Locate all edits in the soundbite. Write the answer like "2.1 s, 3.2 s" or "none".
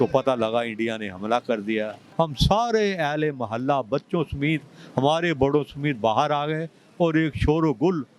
2.0 s

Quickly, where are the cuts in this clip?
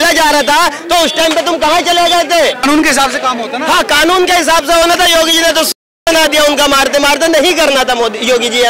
2.6 s

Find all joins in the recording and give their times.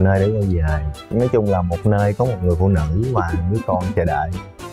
1.0 s

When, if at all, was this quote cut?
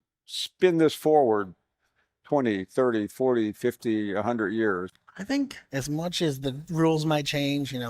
4.9 s

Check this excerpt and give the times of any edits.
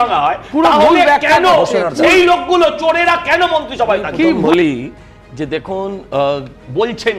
4.4 s

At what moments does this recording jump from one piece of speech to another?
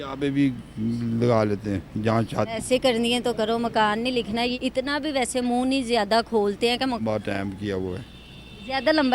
2.5 s, 7.0 s

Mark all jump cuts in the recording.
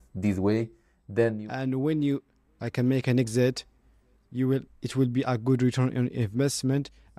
1.4 s

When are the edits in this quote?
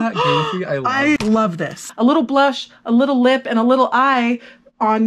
1.8 s

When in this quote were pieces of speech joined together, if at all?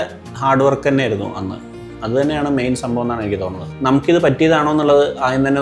3.7 s

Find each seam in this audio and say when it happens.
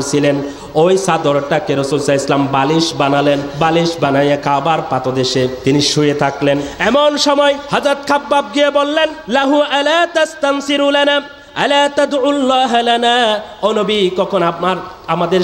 3.5 s, 5.6 s, 6.7 s, 7.6 s, 9.2 s

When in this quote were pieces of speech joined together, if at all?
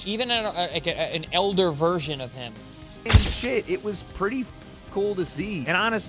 3.0 s

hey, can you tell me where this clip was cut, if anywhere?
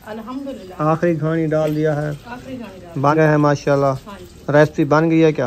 3.1 s

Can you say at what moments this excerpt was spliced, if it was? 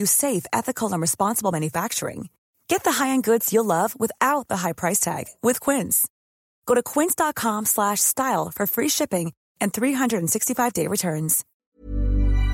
11.5 s

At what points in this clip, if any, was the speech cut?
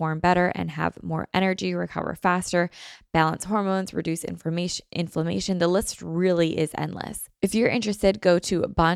7.2 s

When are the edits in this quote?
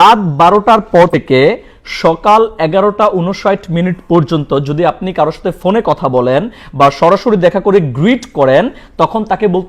1.1 s

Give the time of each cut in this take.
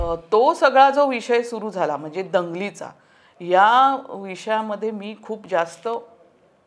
none

